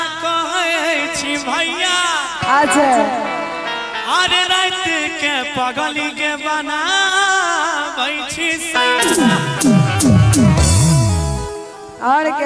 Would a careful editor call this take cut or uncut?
uncut